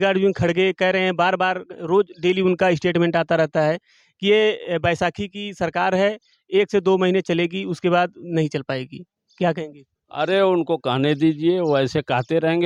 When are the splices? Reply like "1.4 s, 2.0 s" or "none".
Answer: none